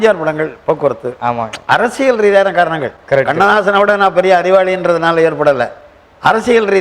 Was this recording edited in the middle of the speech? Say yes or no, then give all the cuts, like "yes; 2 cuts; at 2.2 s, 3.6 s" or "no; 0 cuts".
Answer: no; 0 cuts